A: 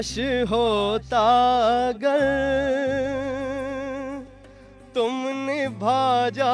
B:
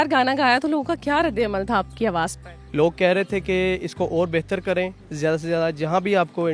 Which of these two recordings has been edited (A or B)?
B